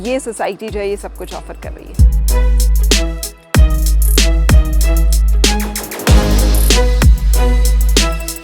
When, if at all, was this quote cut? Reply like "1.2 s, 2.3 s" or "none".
none